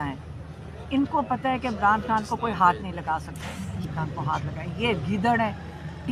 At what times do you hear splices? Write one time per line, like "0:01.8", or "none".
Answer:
0:03.8

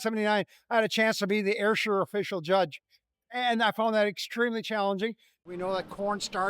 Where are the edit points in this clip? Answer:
0:05.4

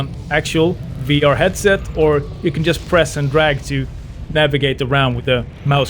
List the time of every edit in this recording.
none

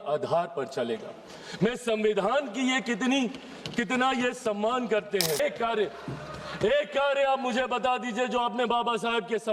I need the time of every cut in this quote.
0:05.4

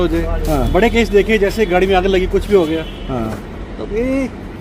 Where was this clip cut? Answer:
none

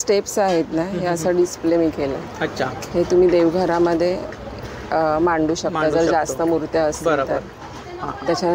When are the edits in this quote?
none

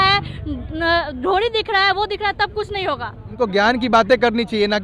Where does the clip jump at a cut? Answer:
0:03.2

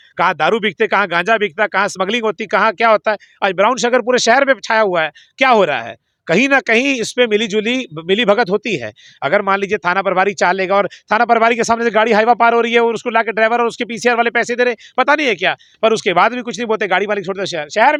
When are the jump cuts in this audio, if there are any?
none

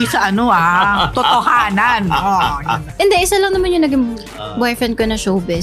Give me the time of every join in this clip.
0:02.9

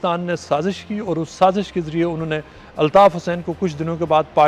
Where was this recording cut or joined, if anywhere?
none

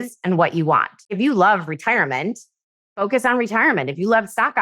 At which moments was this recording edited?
0:01.1

